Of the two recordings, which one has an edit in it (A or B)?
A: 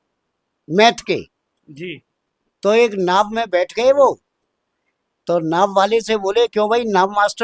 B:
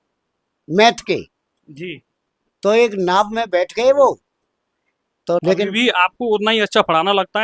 B